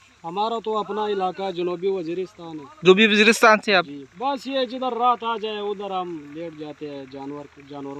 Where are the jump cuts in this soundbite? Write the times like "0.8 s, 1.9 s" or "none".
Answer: 4.1 s